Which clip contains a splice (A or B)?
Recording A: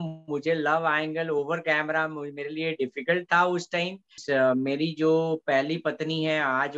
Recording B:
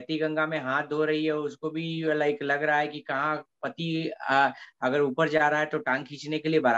A